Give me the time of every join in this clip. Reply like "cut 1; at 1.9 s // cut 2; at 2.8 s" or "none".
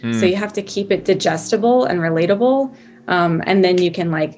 none